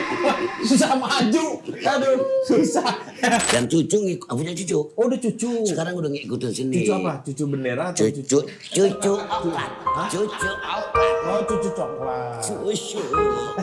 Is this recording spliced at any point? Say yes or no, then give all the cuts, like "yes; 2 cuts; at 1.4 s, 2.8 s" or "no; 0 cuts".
yes; 1 cut; at 3.5 s